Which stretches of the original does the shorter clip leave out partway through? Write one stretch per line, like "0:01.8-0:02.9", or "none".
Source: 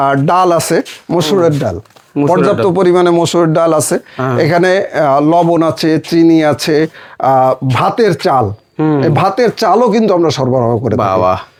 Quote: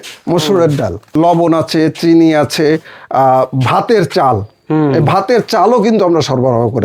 0:02.0-0:05.2